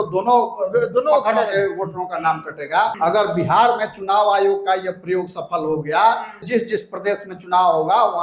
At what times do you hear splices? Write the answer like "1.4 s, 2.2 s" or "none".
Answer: 2.9 s, 6.5 s

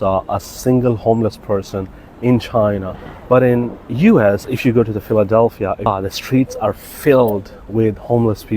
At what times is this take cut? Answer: 5.9 s

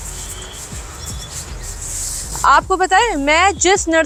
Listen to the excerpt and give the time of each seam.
none

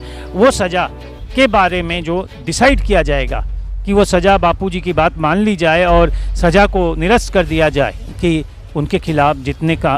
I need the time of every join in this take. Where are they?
8.1 s

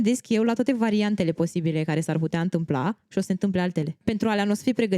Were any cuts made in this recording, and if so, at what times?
4.0 s

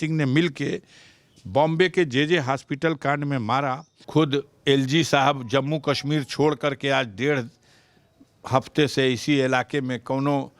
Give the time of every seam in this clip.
3.9 s

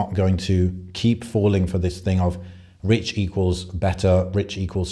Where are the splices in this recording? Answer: none

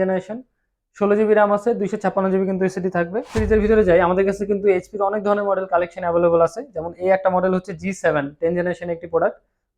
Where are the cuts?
3.4 s

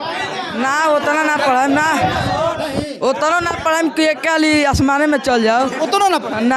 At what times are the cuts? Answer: none

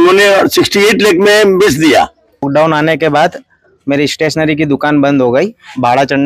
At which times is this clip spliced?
2.5 s

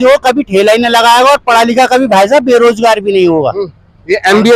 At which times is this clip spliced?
none

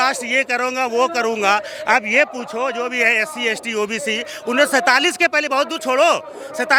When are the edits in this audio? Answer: none

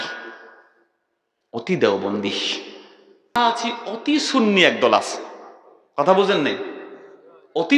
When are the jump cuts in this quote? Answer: 3.4 s

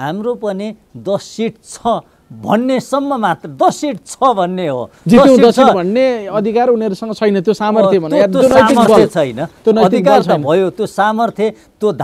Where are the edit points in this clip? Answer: none

